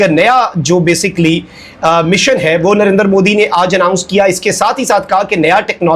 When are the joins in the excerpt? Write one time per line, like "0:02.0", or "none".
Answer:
none